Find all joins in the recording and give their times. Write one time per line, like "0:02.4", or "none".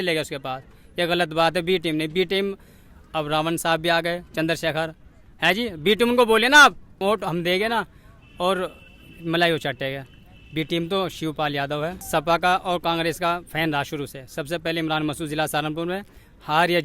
0:06.9
0:12.0